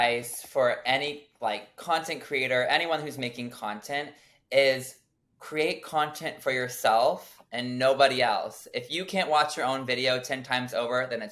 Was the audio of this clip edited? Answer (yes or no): no